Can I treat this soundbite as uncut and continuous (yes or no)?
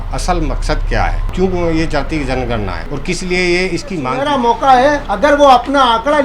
no